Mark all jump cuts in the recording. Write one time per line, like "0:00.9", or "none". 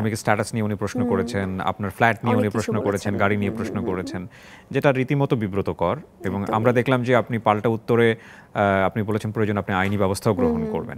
none